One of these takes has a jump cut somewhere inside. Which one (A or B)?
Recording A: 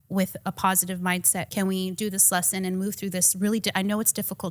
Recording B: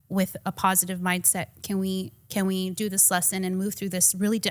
A